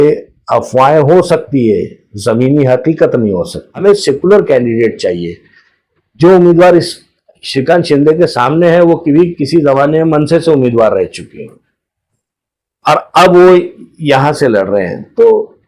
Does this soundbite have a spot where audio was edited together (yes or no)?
yes